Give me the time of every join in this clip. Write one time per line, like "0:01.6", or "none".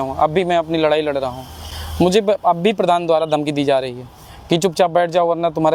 none